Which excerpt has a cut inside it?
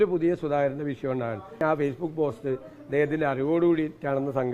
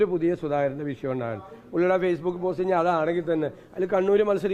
first; 1 cut; at 1.6 s

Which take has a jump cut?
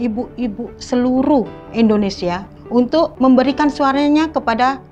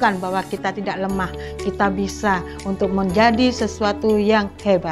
first; 2 cuts; at 1.6 s, 2.9 s

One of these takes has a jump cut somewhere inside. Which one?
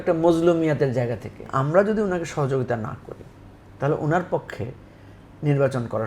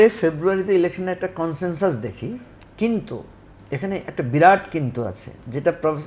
first; 1 cut; at 1.5 s

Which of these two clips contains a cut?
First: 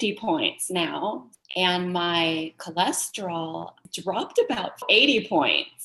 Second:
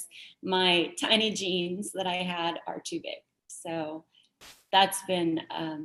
first; 3 cuts; at 1.3 s, 3.9 s, 4.8 s

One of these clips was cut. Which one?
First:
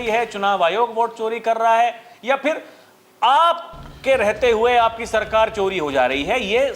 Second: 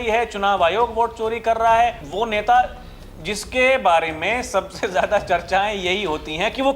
second; 1 cut; at 2.0 s

